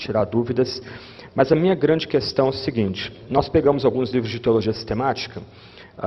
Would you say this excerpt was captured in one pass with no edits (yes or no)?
yes